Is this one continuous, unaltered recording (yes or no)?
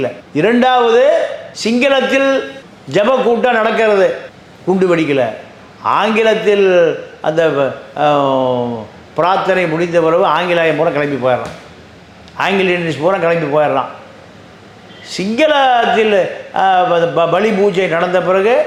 yes